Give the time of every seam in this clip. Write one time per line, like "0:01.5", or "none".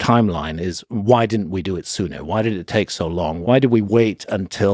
0:03.4